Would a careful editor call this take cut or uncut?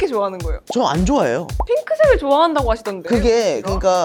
uncut